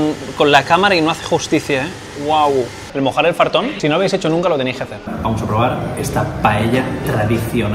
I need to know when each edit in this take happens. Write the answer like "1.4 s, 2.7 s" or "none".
2.9 s, 5.1 s